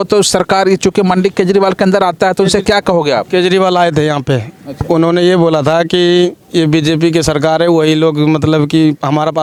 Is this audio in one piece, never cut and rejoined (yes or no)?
yes